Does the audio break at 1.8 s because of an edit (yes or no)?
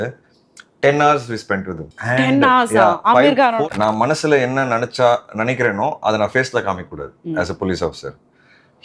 yes